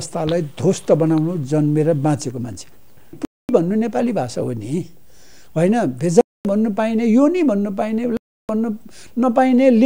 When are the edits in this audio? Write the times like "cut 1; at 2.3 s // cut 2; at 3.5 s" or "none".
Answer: cut 1; at 3.4 s